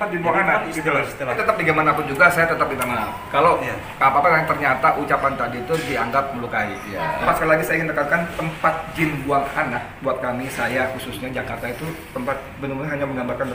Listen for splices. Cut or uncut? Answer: cut